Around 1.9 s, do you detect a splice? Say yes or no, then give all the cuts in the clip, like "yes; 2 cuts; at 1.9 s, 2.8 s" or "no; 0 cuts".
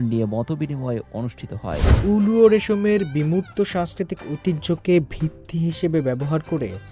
yes; 1 cut; at 1.9 s